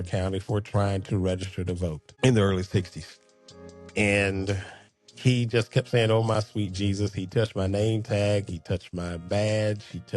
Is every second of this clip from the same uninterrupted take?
no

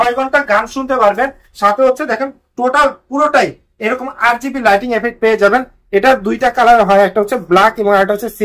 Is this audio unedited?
yes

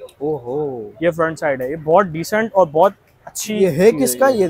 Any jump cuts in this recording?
no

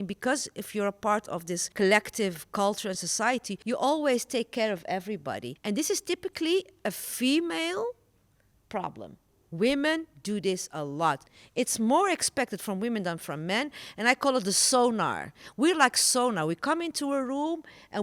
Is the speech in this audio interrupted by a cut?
yes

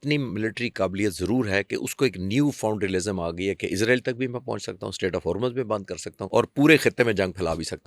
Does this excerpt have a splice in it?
yes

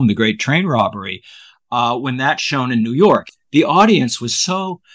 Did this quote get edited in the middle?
yes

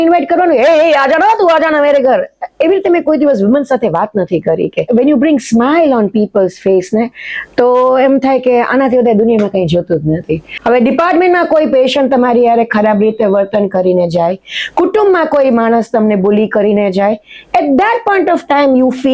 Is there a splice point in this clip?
yes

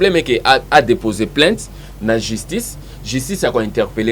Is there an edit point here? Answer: no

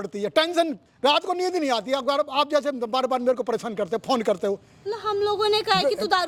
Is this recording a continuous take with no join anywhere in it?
yes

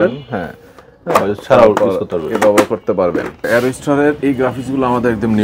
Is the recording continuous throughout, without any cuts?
no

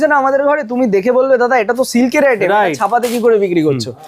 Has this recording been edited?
no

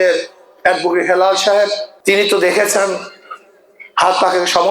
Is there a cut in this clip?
yes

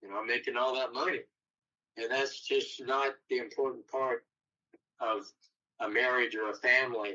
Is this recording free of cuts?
yes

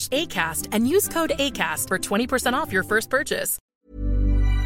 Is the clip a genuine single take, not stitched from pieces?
no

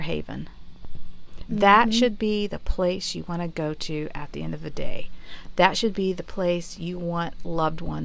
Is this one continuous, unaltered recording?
yes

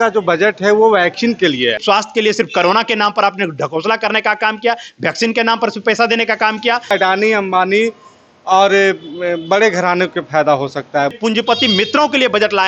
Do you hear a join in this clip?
yes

